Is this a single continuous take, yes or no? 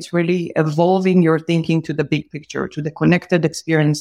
yes